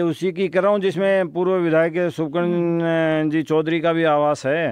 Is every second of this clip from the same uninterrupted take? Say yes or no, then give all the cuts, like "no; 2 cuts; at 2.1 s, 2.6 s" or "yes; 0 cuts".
yes; 0 cuts